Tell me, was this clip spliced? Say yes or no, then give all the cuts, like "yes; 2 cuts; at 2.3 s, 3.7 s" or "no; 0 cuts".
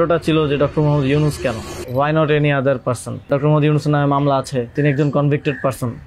yes; 3 cuts; at 1.7 s, 3.3 s, 4.7 s